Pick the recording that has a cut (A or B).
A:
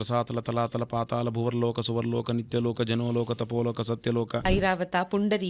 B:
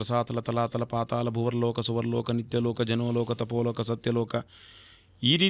A